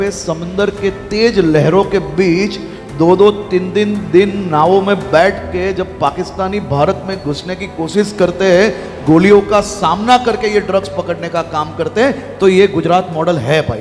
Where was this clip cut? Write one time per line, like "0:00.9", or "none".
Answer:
none